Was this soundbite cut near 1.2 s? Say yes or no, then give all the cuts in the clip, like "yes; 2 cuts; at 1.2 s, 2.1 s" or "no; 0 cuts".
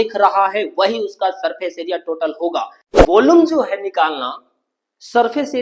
no; 1 cut; at 2.8 s